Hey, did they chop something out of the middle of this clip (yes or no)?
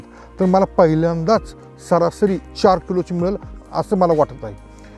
yes